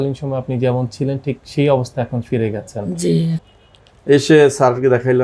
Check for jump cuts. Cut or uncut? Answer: cut